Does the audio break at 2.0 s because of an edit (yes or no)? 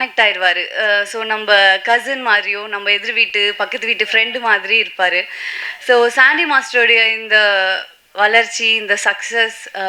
no